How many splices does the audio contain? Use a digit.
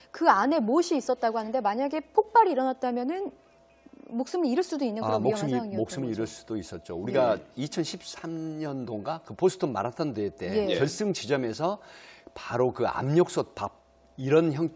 1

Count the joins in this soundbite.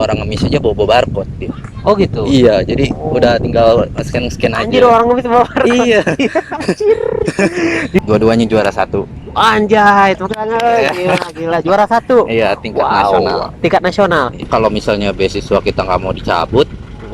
2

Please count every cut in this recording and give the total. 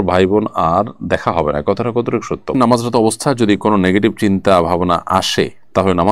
1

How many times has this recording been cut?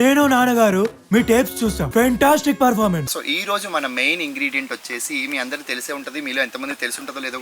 2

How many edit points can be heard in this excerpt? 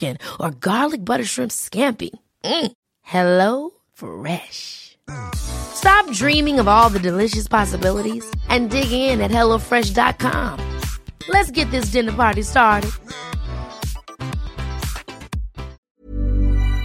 1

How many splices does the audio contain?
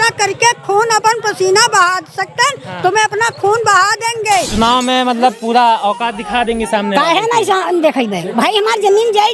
1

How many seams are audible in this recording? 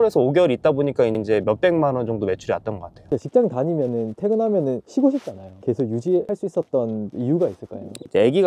3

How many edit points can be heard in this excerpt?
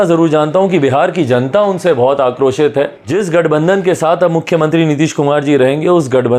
1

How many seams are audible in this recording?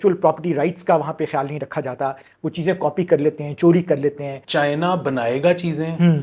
1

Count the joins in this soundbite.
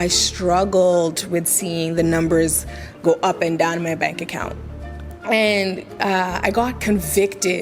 1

